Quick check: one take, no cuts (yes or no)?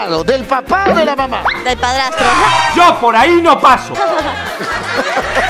yes